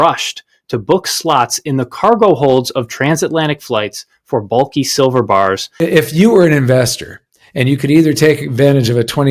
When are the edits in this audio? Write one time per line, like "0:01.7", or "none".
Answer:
0:05.7